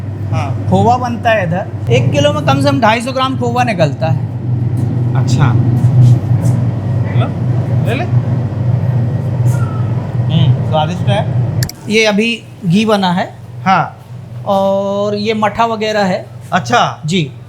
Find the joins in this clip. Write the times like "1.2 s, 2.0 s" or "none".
1.8 s, 11.6 s